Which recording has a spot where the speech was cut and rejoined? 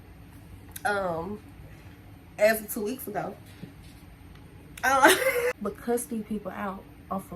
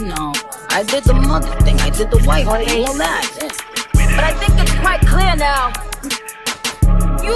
first; 1 cut; at 5.7 s

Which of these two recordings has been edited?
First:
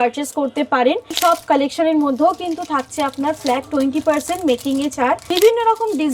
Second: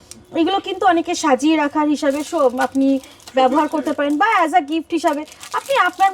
first; 2 cuts; at 1.2 s, 5.2 s

